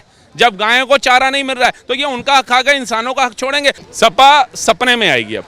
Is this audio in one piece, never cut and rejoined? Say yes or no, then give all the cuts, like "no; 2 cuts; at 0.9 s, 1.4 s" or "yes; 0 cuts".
no; 1 cut; at 3.8 s